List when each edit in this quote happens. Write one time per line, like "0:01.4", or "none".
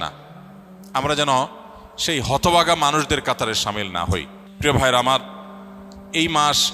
0:04.4